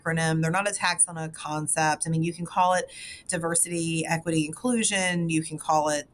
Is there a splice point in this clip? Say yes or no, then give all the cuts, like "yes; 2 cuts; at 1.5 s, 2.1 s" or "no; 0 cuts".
no; 0 cuts